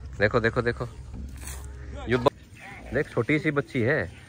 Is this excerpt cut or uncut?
cut